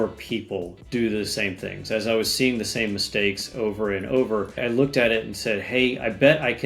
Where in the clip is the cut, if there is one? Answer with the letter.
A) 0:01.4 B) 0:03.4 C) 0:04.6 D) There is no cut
C